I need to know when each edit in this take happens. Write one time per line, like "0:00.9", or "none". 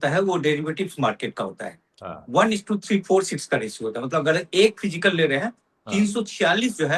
none

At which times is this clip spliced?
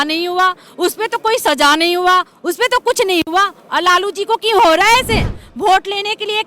0:05.4

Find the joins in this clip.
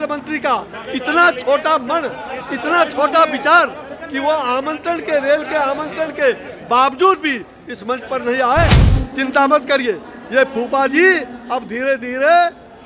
0:08.8

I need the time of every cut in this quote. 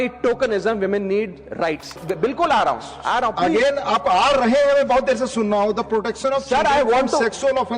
0:02.0

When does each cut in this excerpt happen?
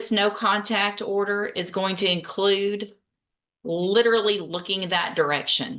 none

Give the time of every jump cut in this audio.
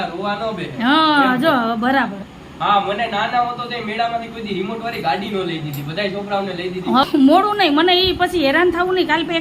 0:02.2
0:07.0

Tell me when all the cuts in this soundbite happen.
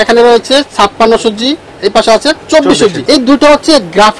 0:03.0

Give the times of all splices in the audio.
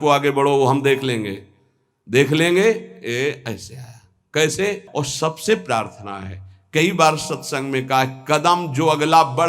0:04.8

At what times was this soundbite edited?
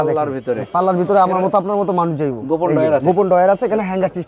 none

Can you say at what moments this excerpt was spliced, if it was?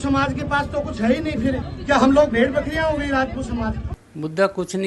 0:01.7

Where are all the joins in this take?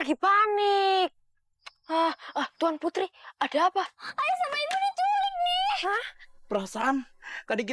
none

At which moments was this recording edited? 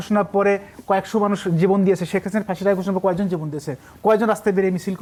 none

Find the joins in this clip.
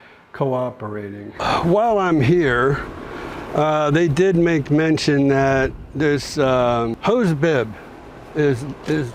0:01.4
0:07.0

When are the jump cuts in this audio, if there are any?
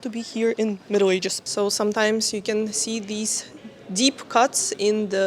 0:01.4

